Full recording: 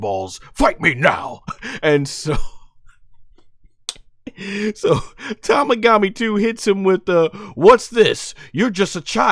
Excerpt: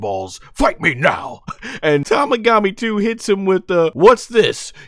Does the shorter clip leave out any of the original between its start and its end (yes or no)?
yes